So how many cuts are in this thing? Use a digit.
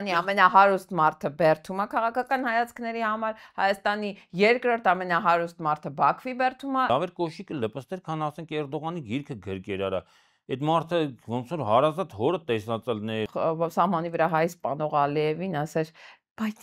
2